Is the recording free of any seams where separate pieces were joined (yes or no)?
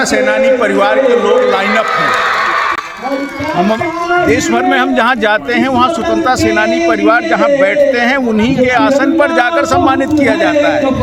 yes